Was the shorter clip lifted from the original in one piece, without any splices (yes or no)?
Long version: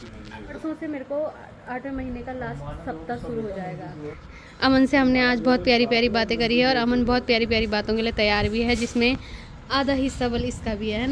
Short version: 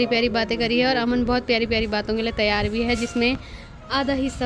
yes